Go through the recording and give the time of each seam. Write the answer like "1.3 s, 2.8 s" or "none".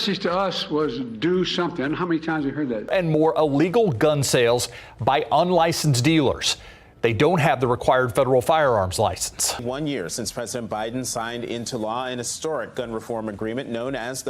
2.8 s, 9.6 s